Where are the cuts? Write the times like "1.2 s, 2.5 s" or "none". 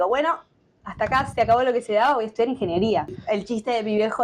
3.2 s

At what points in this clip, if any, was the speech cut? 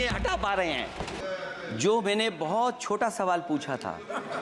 1.2 s

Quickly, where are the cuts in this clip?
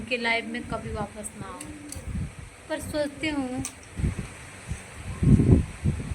3.8 s

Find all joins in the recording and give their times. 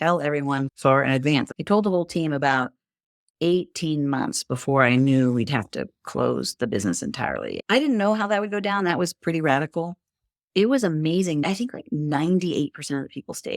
1.5 s, 7.6 s, 11.4 s

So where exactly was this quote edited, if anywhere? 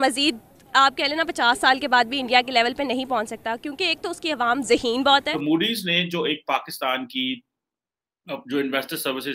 5.3 s

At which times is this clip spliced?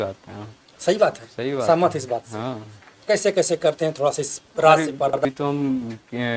5.1 s

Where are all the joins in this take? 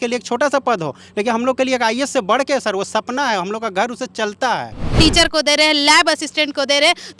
4.8 s

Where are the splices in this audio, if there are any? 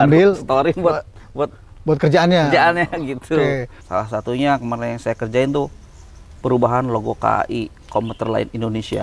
3.8 s

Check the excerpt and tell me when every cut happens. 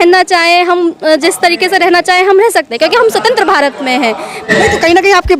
4.4 s

